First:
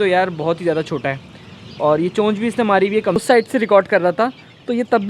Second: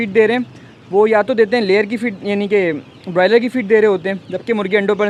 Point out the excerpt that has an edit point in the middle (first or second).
first